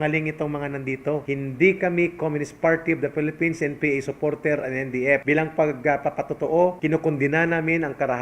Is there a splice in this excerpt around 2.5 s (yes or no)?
no